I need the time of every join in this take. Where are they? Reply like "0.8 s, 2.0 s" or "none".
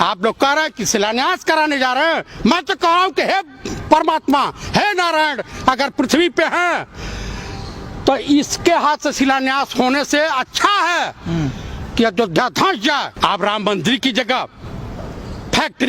13.1 s